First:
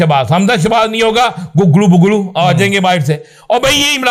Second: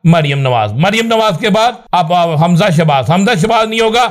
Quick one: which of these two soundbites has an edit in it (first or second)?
second